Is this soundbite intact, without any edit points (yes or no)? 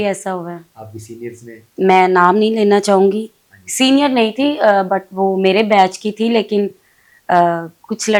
yes